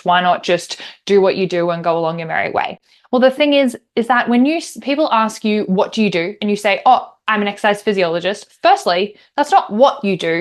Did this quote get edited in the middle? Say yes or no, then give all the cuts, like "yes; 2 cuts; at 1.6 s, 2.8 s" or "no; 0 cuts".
no; 0 cuts